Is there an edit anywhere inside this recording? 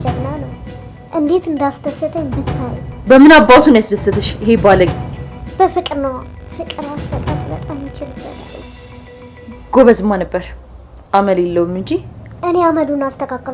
no; 0 cuts

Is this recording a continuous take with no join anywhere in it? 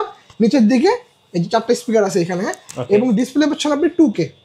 yes; 0 cuts

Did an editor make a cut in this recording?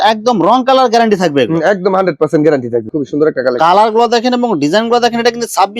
yes; 1 cut; at 2.9 s

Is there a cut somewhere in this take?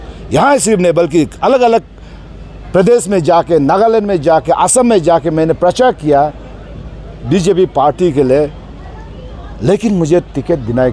no; 0 cuts

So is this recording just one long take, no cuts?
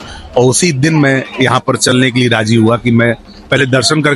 yes; 0 cuts

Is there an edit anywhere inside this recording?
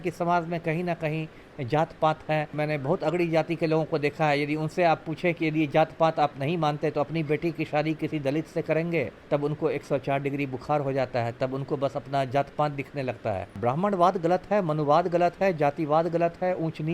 yes; 3 cuts; at 2.5 s, 9.2 s, 13.6 s

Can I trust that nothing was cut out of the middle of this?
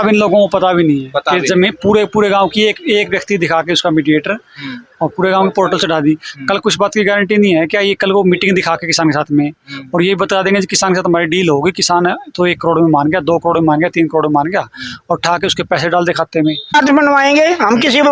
no; 1 cut; at 16.7 s

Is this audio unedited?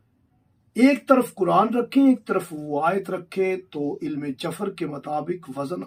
yes; 0 cuts

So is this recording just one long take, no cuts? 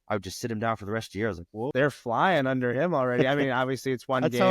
no; 1 cut; at 1.7 s

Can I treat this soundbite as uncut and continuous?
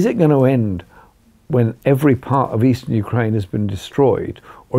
yes; 0 cuts

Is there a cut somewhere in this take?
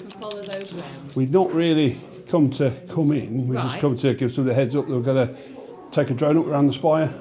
no; 0 cuts

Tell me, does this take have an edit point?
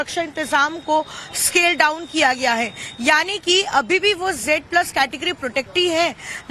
yes; 1 cut; at 2.8 s

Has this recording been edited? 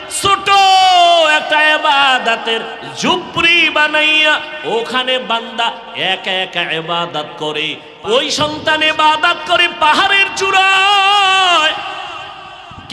yes; 1 cut; at 7.8 s

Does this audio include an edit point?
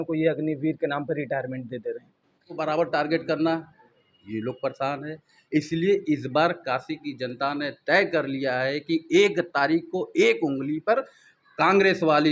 yes; 1 cut; at 2.6 s

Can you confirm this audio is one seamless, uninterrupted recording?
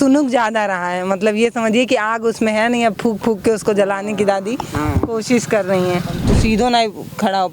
no; 1 cut; at 6.2 s

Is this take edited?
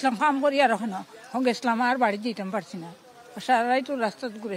no; 0 cuts

